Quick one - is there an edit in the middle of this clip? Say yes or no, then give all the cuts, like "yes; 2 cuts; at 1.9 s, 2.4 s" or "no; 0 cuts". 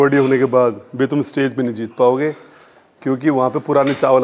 no; 0 cuts